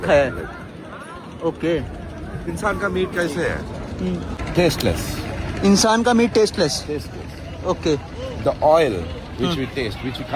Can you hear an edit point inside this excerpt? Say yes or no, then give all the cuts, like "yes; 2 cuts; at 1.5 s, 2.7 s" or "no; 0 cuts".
no; 0 cuts